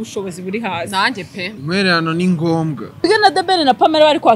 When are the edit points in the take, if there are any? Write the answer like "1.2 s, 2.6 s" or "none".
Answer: 1.5 s, 3.1 s